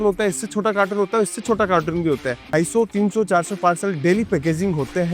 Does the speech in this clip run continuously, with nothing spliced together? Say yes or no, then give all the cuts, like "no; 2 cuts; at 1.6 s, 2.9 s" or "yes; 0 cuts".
no; 1 cut; at 2.4 s